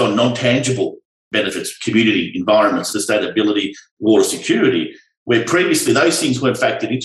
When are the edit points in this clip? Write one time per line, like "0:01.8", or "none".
0:02.9